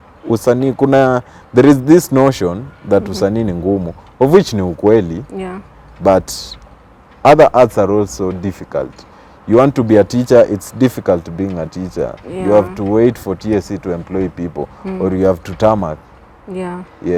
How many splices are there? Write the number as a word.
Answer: zero